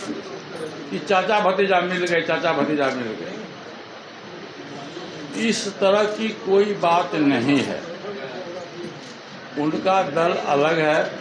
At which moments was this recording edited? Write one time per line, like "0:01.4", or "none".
none